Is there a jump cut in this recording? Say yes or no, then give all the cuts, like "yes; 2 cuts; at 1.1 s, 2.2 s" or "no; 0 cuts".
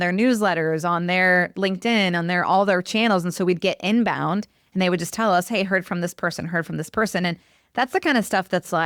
no; 0 cuts